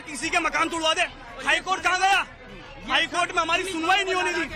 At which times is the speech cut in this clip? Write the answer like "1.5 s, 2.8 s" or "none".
1.3 s